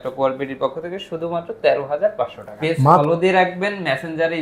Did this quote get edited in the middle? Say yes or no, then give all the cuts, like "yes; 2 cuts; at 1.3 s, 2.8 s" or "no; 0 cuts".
yes; 1 cut; at 3.0 s